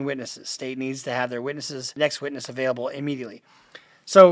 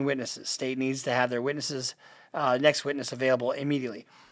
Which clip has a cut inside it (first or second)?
first